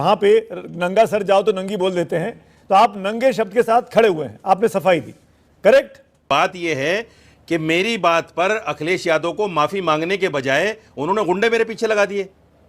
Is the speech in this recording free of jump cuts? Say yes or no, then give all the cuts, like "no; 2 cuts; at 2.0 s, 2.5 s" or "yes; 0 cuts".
no; 1 cut; at 6.2 s